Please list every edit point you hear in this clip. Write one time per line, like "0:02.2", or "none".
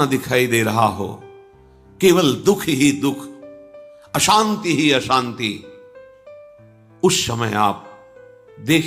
none